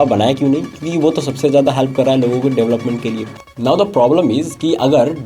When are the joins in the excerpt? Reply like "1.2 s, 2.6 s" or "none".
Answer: 3.6 s